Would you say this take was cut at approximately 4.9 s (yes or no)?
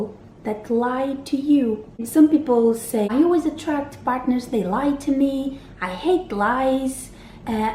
no